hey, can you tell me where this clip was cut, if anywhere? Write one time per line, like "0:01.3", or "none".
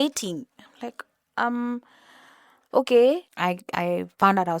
0:03.3